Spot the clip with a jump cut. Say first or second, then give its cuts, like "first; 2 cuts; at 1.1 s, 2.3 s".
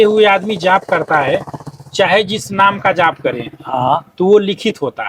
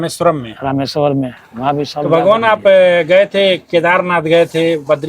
second; 1 cut; at 2.1 s